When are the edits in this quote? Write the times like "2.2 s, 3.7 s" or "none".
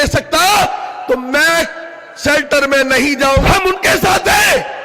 3.4 s